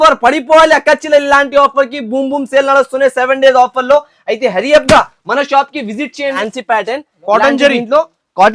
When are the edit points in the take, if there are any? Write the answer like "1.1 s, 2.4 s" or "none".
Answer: 6.4 s